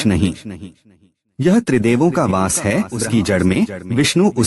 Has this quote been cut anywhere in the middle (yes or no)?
yes